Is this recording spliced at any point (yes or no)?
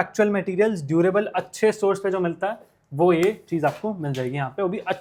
no